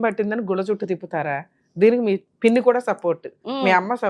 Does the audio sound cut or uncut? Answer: cut